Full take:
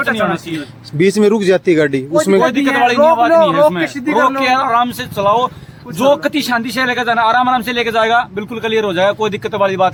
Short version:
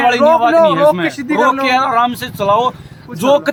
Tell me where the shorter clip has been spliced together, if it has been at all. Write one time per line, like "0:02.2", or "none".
none